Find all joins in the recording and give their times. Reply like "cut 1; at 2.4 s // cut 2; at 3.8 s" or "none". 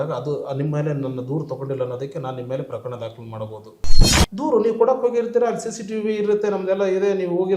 cut 1; at 3.8 s